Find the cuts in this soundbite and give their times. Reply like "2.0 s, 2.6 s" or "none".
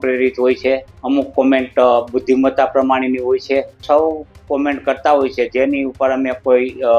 0.9 s, 3.8 s